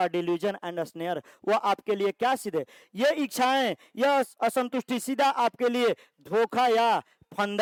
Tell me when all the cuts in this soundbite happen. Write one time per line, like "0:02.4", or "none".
none